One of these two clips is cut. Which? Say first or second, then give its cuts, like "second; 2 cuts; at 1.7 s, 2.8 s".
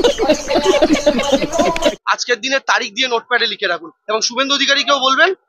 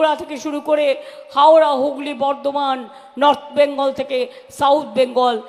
first; 1 cut; at 2.0 s